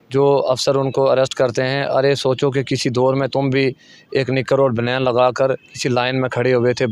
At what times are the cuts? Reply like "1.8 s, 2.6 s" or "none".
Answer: none